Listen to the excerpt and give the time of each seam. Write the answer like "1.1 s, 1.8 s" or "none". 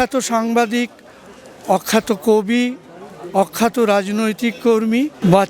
none